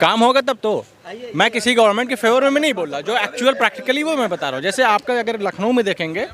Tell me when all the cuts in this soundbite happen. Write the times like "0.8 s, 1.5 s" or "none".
none